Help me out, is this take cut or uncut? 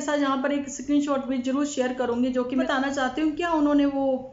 cut